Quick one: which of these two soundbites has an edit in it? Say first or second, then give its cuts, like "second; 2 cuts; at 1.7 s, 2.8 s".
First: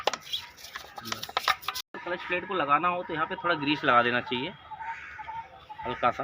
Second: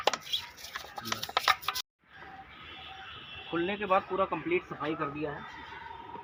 first; 1 cut; at 2.0 s